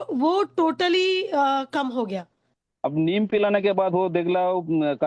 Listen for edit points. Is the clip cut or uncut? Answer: cut